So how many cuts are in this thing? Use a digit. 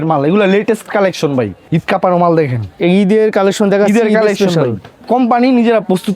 2